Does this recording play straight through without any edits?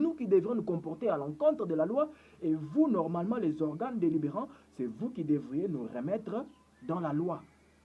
yes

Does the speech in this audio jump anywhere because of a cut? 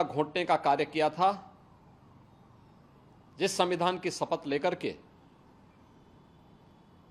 no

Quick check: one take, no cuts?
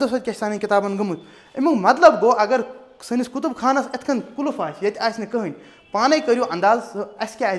yes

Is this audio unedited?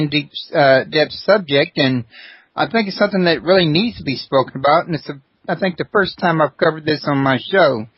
yes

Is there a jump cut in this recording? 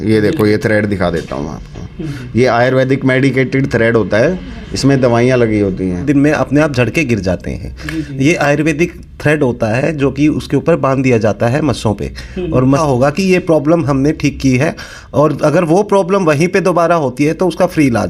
yes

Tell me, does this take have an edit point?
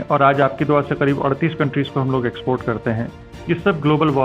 yes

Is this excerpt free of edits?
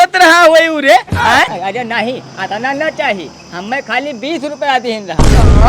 no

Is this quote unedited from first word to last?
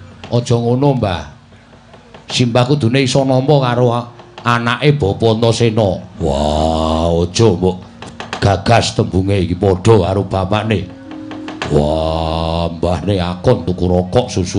no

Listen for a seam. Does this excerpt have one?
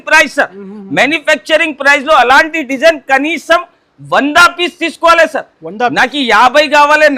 no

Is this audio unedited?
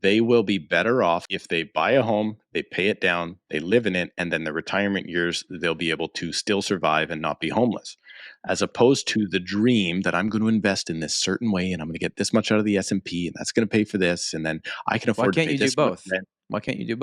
no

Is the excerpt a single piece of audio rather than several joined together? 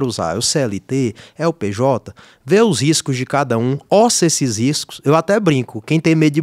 yes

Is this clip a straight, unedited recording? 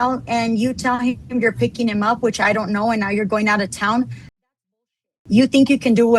yes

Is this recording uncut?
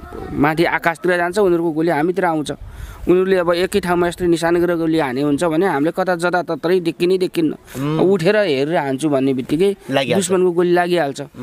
yes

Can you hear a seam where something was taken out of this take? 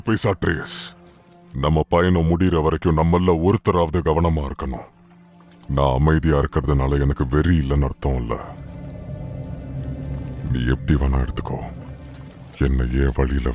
no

